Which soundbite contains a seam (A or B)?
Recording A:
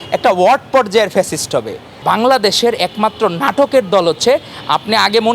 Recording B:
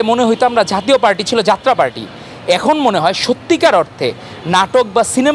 A